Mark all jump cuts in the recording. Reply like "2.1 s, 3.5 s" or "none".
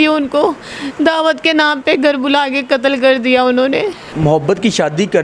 4.0 s